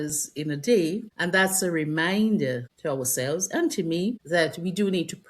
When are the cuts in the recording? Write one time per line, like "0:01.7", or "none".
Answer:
0:01.1
0:02.7
0:04.2